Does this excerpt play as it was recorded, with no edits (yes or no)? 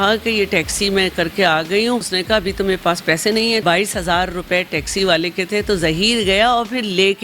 no